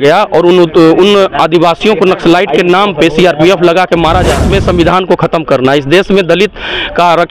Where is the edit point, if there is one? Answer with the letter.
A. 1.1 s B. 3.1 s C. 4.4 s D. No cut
C